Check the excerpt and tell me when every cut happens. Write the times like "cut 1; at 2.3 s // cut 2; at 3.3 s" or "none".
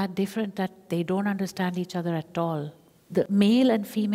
cut 1; at 3.2 s